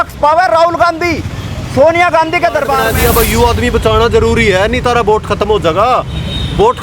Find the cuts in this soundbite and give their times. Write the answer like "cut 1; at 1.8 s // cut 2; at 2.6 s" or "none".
cut 1; at 2.9 s

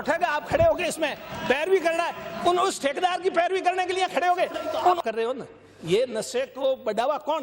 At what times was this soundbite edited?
cut 1; at 5.0 s

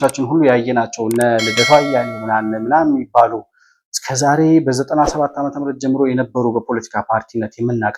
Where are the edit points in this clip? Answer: none

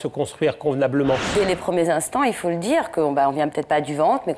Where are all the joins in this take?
cut 1; at 1.3 s

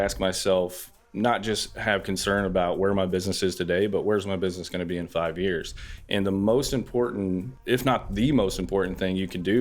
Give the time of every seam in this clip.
cut 1; at 0.9 s // cut 2; at 7.5 s

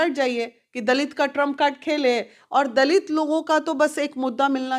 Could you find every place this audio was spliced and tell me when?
cut 1; at 2.4 s

